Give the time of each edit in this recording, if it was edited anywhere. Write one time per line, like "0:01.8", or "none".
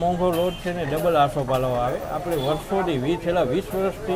none